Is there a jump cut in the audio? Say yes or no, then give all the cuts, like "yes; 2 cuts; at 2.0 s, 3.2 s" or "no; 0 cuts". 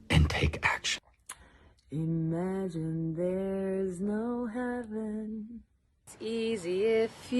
yes; 1 cut; at 1.0 s